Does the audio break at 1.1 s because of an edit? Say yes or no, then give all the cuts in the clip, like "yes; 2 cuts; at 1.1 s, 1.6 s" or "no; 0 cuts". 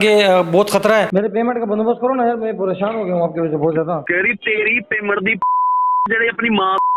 yes; 1 cut; at 1.1 s